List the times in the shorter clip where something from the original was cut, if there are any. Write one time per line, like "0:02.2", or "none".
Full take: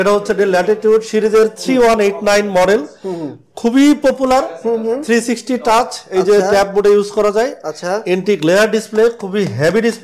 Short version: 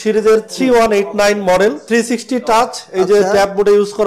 0:01.8